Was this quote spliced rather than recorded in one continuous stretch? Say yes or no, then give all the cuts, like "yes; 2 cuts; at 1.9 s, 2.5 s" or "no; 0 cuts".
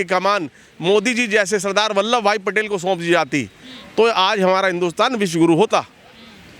no; 0 cuts